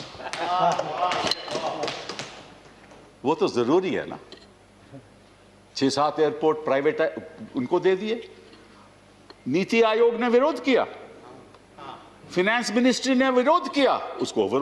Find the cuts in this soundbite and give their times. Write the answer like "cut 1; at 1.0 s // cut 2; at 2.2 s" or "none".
none